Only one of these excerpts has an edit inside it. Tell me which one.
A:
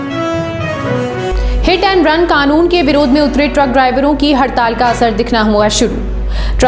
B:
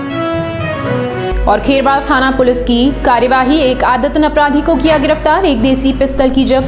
B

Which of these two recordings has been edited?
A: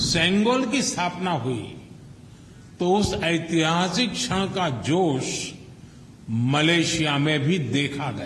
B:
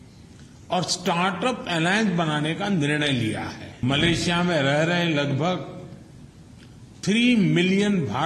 B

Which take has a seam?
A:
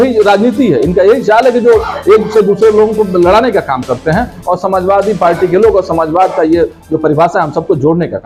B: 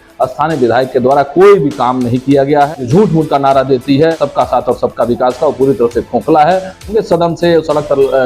B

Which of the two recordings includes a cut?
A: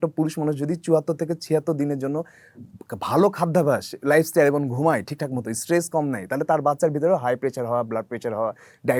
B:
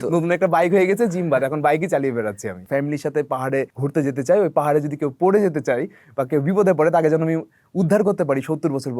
B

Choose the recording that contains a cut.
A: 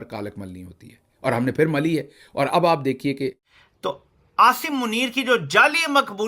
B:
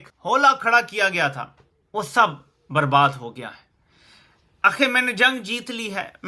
A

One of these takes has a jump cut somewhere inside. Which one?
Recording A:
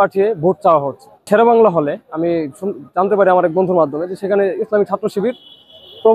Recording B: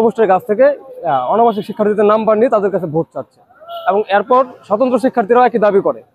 A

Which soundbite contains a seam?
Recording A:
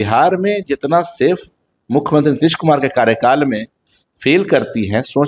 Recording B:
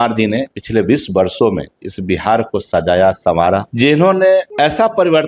B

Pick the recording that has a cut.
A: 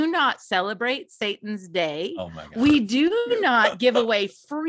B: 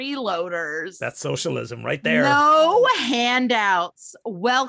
B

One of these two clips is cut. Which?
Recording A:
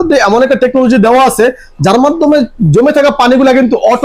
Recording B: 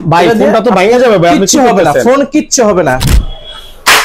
B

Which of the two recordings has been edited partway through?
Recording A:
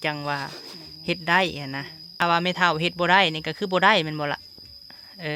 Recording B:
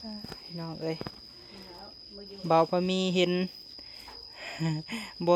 A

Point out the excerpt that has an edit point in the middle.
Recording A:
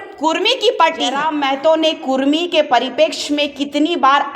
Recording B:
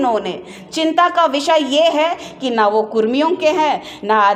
A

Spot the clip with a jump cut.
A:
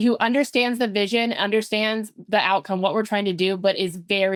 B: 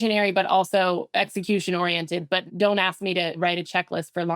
B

